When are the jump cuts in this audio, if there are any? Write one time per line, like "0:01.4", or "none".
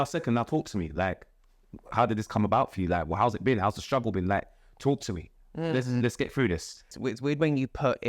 0:06.9